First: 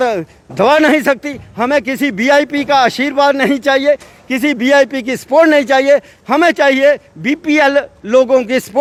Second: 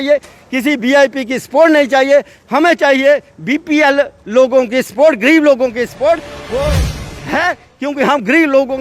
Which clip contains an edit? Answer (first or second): second